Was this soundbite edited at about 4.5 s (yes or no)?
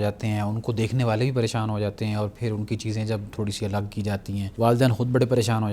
yes